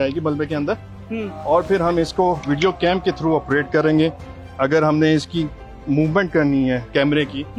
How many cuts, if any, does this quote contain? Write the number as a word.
zero